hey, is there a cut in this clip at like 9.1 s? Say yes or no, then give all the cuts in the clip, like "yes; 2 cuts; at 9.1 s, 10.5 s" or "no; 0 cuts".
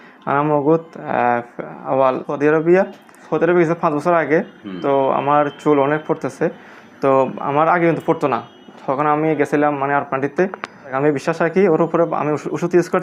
no; 3 cuts; at 2.3 s, 3.2 s, 10.9 s